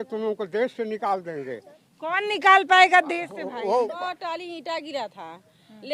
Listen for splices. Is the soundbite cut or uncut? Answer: cut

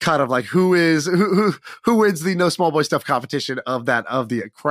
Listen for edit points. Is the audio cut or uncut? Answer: uncut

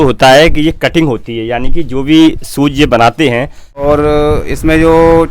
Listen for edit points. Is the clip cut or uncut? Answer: cut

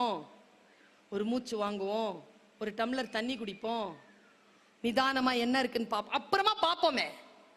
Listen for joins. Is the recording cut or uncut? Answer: uncut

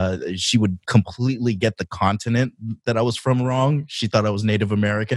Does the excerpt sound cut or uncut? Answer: uncut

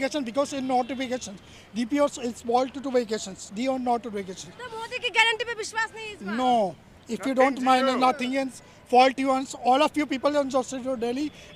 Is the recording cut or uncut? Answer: uncut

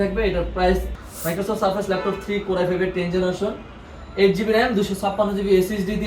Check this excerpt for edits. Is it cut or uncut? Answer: cut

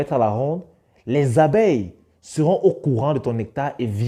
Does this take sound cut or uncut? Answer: uncut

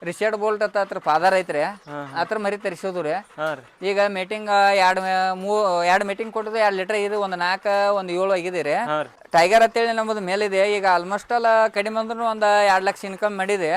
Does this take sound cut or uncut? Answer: cut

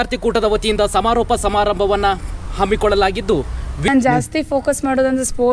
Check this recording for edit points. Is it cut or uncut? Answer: cut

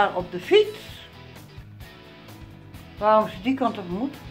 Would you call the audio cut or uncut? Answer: cut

